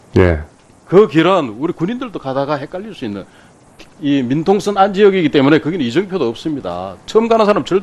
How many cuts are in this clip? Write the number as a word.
zero